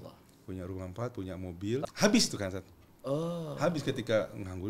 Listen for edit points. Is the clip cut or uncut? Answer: cut